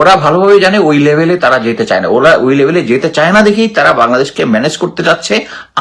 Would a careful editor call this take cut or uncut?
uncut